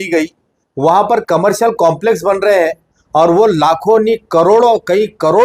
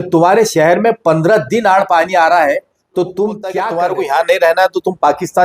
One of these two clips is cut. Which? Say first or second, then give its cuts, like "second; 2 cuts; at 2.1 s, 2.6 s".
second; 1 cut; at 3.5 s